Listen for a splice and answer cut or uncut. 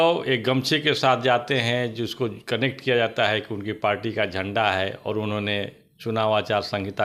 uncut